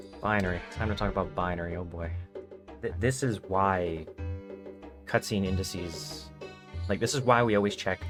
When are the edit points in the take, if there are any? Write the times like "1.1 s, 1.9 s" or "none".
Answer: none